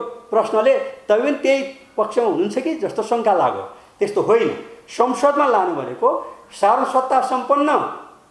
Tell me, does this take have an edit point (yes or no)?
no